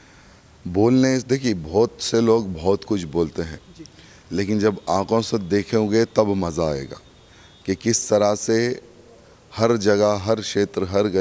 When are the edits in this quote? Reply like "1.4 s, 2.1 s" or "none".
none